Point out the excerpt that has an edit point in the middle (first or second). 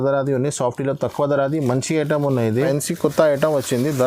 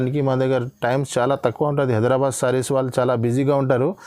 first